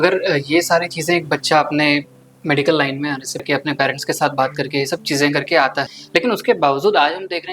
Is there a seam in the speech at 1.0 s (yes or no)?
no